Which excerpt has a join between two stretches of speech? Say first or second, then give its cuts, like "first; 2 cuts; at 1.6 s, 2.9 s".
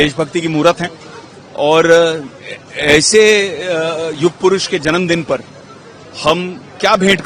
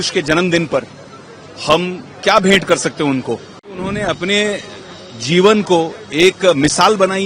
second; 1 cut; at 3.9 s